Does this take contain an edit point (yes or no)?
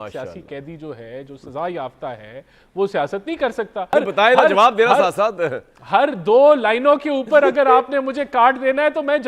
yes